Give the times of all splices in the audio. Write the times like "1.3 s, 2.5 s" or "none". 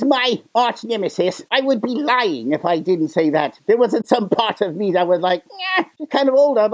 none